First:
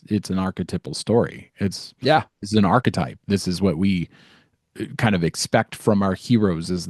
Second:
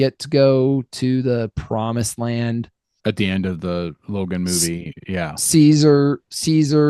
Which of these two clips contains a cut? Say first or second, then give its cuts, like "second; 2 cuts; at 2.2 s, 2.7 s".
second; 1 cut; at 2.9 s